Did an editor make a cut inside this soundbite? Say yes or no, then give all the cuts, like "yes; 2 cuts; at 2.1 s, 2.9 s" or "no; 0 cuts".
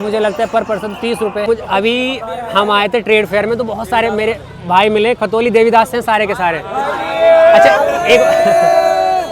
yes; 1 cut; at 1.5 s